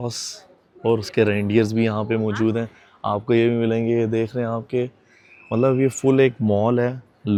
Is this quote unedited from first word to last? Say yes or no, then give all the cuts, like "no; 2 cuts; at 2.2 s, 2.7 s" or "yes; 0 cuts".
yes; 0 cuts